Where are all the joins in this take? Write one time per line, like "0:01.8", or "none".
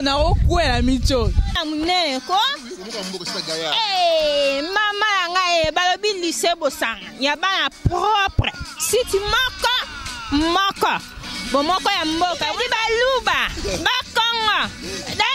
0:01.6